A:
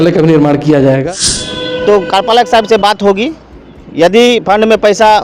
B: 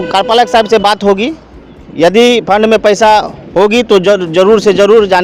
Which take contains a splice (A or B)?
A